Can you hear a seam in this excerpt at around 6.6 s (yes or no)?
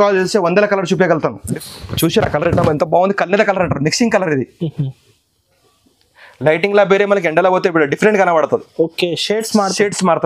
no